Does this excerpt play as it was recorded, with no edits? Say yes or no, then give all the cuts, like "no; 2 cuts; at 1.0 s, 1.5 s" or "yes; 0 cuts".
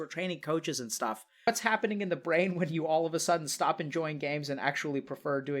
no; 1 cut; at 1.5 s